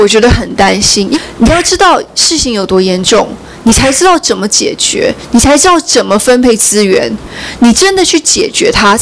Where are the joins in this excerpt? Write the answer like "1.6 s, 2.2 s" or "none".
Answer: 1.1 s